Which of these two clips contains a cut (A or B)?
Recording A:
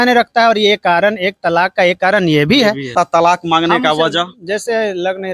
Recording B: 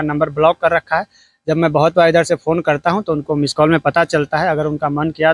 A